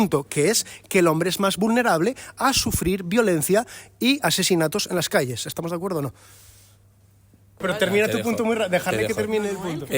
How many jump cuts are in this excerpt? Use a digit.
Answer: 1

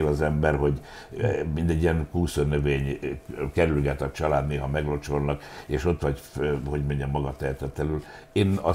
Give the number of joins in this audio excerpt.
0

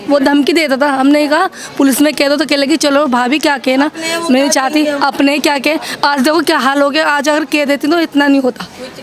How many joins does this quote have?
0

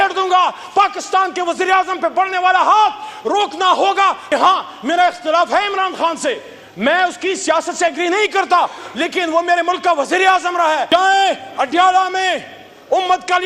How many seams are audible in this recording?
2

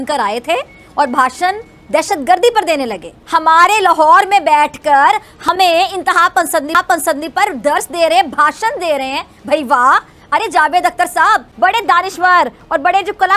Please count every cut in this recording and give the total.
2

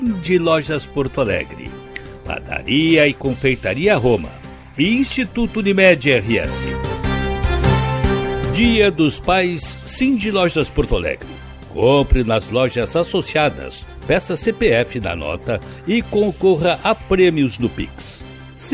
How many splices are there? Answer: 2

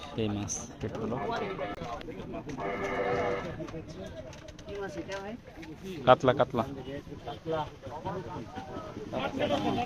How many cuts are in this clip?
0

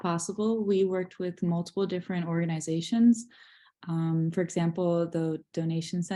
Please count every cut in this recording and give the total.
0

